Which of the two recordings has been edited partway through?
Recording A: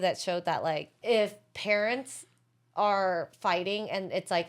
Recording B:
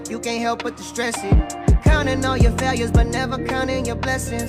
A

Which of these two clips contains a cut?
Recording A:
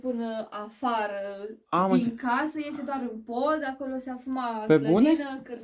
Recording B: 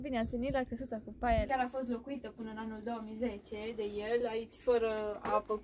B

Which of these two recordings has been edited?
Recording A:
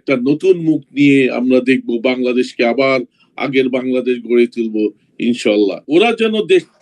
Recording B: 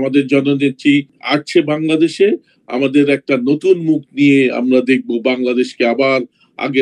A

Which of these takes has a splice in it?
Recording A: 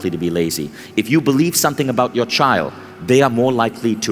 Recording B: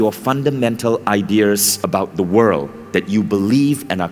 B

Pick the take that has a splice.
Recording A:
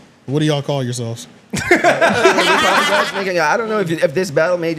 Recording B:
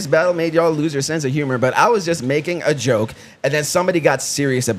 A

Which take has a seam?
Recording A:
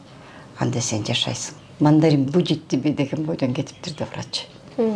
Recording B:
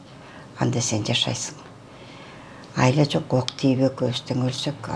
A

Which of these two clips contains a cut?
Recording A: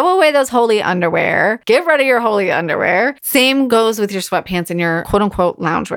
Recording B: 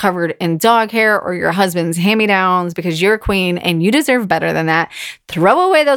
A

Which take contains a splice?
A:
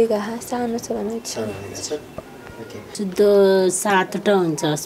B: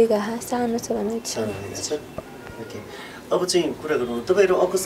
A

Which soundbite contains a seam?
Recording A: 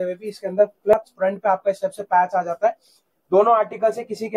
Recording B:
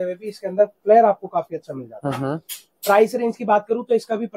A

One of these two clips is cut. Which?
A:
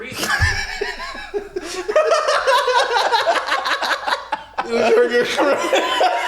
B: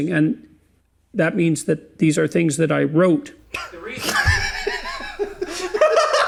A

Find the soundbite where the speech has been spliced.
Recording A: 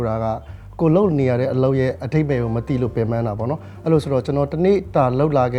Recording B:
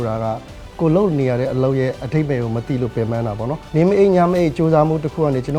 B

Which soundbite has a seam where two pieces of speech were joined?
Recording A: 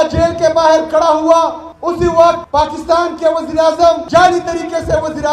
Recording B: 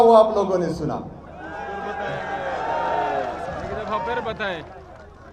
A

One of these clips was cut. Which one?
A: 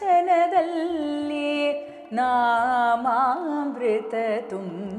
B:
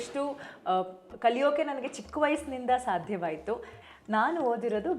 B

